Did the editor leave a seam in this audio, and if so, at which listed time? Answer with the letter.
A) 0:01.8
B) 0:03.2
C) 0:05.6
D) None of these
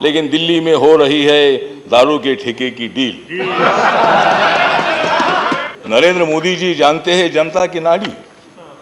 C